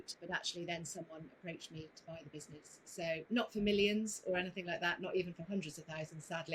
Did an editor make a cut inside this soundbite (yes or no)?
no